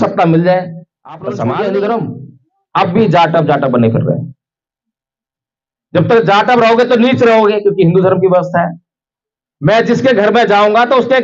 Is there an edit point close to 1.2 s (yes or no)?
yes